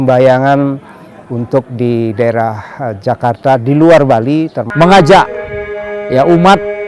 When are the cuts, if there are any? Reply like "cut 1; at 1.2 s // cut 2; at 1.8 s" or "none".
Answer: cut 1; at 4.6 s